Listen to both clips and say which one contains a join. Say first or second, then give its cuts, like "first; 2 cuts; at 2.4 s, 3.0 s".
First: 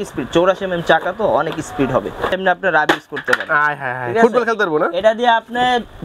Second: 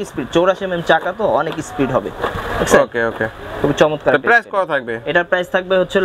first; 1 cut; at 2.4 s